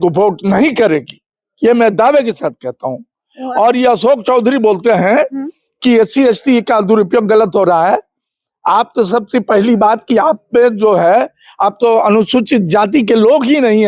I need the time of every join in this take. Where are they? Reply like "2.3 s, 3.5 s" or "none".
none